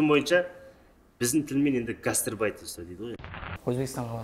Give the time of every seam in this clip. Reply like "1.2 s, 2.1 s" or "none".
3.2 s